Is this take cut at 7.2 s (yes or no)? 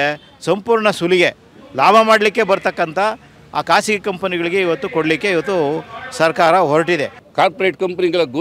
yes